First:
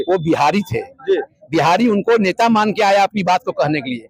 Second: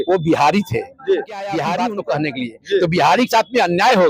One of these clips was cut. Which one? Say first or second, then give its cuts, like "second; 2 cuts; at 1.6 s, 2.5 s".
second; 1 cut; at 1.7 s